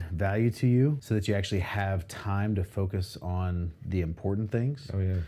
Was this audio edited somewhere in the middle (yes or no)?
yes